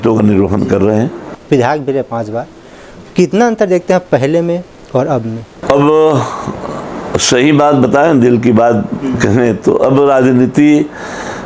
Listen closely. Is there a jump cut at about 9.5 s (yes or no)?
no